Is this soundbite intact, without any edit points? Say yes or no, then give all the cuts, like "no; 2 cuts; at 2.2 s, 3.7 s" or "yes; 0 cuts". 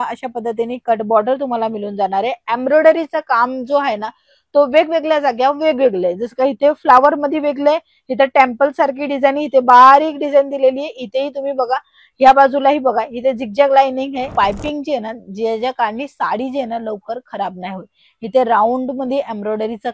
no; 1 cut; at 14.3 s